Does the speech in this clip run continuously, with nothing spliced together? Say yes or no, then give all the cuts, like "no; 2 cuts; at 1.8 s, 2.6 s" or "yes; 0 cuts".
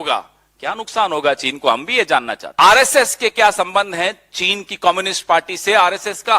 no; 1 cut; at 2.4 s